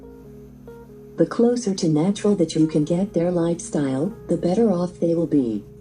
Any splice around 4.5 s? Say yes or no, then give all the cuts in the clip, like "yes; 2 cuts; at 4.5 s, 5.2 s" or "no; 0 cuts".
no; 1 cut; at 1.2 s